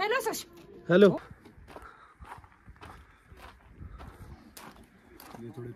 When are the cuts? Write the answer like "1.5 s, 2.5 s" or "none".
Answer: 1.2 s